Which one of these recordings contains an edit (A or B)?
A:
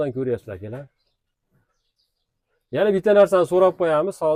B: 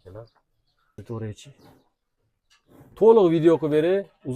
B